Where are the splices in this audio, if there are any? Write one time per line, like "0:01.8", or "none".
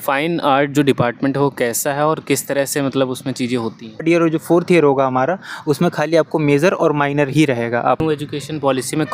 0:04.0
0:08.0